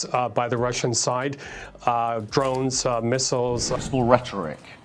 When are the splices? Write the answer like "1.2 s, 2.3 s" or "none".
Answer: 3.8 s